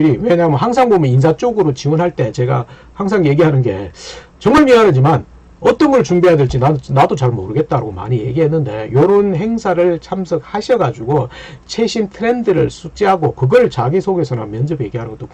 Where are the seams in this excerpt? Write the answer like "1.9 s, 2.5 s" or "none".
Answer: none